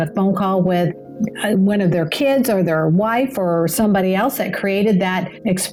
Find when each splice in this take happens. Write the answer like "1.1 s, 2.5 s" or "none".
none